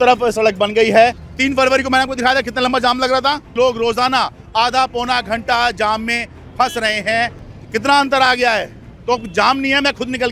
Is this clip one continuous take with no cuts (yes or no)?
no